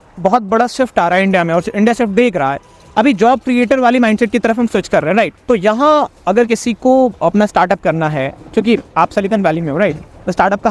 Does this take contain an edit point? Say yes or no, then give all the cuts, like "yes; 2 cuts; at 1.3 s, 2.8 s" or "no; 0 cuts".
no; 0 cuts